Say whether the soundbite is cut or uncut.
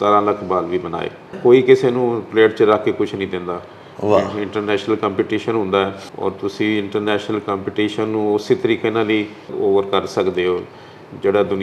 cut